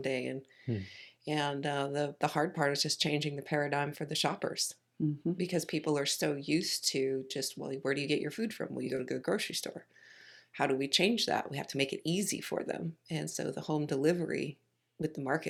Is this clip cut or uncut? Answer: uncut